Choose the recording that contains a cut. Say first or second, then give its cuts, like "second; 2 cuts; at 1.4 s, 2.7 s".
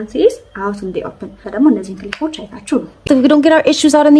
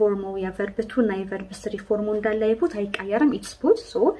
first; 2 cuts; at 1.4 s, 3.0 s